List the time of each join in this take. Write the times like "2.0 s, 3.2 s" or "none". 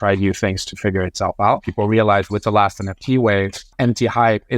1.7 s, 3.7 s